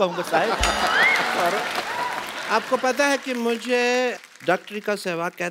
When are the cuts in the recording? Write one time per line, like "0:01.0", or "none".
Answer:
0:02.3